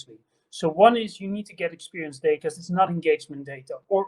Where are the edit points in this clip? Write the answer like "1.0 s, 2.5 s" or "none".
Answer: 2.4 s